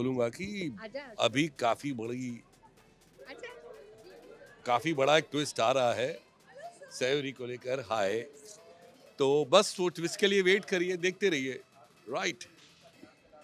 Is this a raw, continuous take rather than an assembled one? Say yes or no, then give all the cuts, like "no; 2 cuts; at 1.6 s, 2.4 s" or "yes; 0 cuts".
yes; 0 cuts